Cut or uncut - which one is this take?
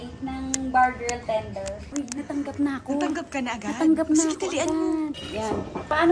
cut